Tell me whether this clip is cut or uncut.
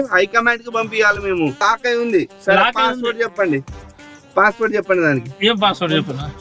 cut